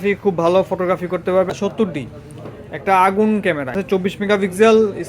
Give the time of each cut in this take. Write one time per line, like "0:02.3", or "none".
0:01.5
0:03.8